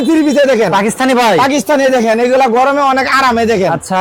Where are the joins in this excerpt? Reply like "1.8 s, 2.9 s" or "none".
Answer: none